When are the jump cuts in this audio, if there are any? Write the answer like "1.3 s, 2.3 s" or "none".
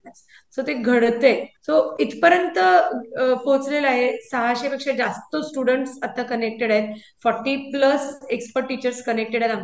1.5 s